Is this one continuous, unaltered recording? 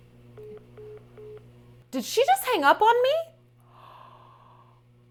yes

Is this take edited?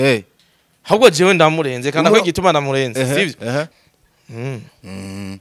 yes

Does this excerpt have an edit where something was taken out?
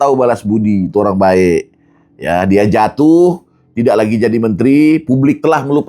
no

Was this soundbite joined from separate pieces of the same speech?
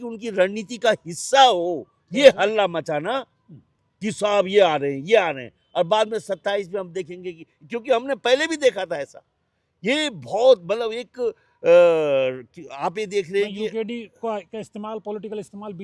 no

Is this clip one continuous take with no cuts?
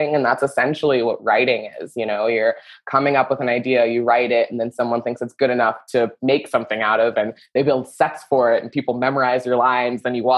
yes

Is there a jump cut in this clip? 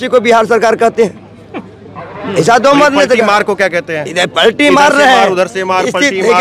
no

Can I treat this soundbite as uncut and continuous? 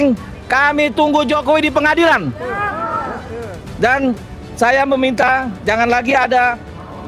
yes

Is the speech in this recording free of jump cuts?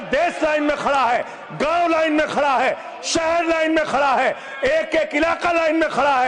yes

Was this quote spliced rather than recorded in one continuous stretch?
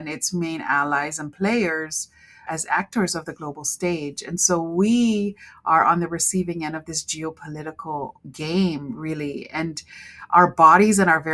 no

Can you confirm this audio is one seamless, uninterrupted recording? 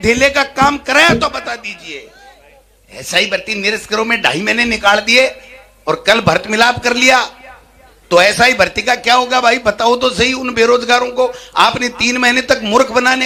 yes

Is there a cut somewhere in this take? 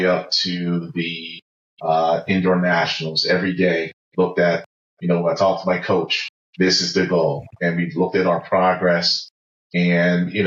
no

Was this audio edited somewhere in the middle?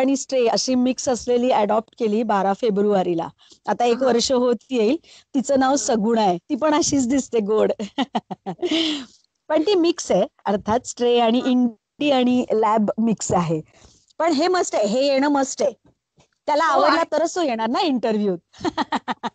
no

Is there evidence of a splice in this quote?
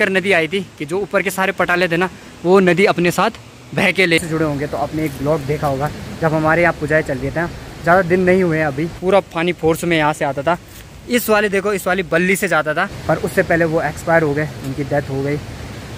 yes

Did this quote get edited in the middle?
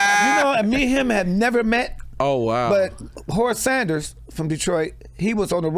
no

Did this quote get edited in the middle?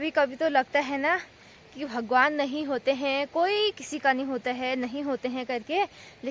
no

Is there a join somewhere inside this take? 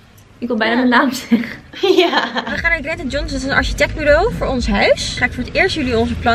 yes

